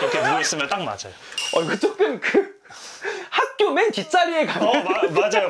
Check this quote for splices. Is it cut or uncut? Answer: uncut